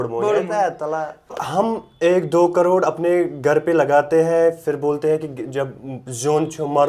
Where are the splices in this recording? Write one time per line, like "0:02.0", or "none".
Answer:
0:01.3